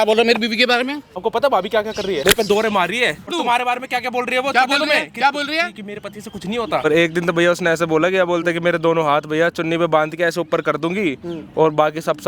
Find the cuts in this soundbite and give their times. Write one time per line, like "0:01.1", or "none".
0:01.2
0:02.2
0:03.3
0:06.8